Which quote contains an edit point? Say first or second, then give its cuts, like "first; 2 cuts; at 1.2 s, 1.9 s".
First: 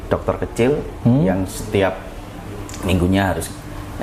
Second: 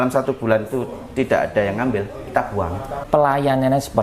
second; 1 cut; at 3.0 s